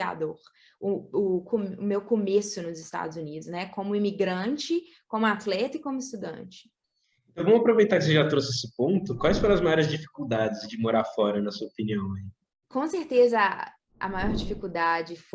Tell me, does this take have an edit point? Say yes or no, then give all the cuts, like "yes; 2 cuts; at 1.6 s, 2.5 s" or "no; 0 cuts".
no; 0 cuts